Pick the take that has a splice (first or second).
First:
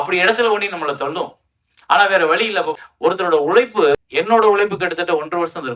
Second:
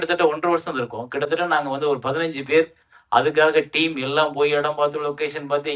first